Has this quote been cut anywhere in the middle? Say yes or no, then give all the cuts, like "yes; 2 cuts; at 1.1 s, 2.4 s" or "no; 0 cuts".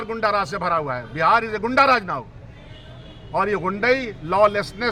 no; 0 cuts